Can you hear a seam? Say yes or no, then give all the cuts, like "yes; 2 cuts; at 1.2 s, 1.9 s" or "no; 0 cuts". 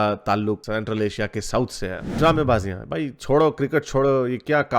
yes; 1 cut; at 2.0 s